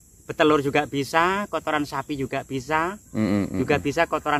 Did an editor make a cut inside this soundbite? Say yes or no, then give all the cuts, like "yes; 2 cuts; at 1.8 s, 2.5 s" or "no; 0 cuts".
no; 0 cuts